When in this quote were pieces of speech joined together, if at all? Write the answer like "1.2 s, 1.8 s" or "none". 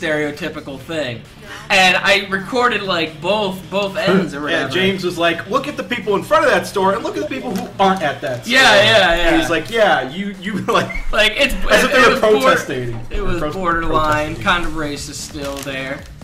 none